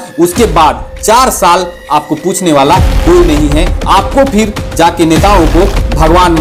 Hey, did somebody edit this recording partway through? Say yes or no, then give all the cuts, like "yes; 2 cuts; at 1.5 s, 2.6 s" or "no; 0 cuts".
no; 0 cuts